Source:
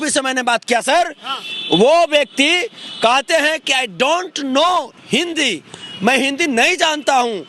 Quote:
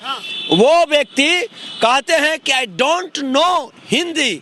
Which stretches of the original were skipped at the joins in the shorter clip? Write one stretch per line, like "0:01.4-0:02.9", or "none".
none